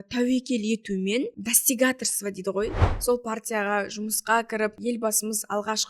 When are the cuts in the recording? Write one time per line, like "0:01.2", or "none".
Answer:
0:01.4
0:02.8
0:04.8